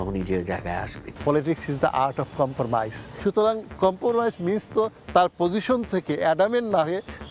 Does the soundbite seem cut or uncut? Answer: cut